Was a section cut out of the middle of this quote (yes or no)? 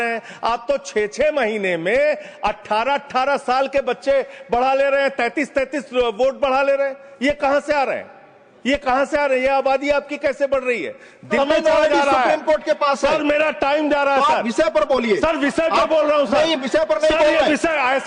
yes